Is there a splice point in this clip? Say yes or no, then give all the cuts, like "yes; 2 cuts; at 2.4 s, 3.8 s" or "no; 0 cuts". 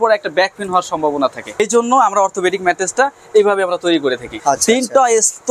yes; 2 cuts; at 1.6 s, 4.3 s